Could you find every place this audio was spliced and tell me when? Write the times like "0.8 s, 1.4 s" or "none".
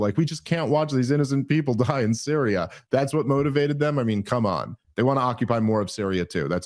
4.8 s